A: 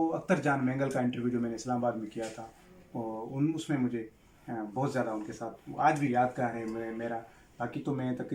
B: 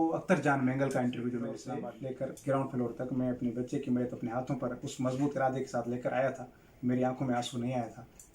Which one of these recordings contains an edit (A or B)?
B